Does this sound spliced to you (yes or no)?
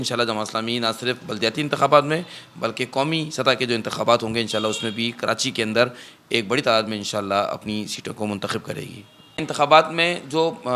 yes